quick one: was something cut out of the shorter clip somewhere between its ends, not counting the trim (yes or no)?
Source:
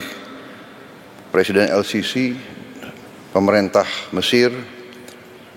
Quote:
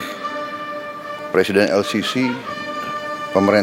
no